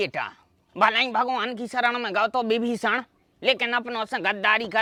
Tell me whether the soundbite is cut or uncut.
uncut